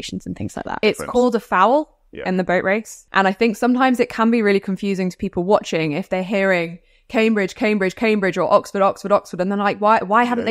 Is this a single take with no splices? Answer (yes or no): no